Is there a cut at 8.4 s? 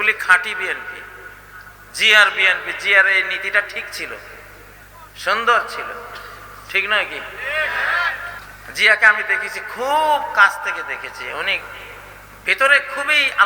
yes; 1 cut; at 8.4 s

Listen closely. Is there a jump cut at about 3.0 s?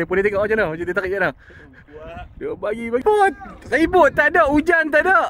yes; 1 cut; at 3.0 s

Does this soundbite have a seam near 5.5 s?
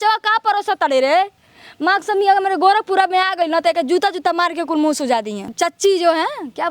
yes; 1 cut; at 5.5 s

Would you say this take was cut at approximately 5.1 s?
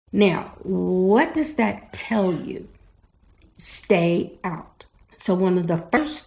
yes; 1 cut; at 5.1 s

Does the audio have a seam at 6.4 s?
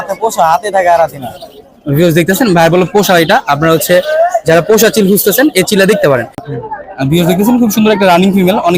yes; 1 cut; at 6.4 s

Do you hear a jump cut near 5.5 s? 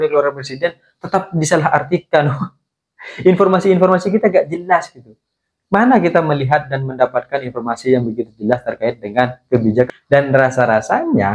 no; 1 cut; at 9.9 s

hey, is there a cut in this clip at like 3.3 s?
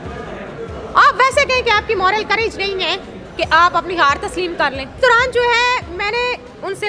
no; 1 cut; at 5.0 s

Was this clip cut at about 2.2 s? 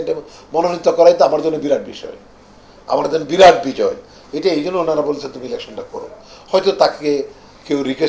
no; 0 cuts

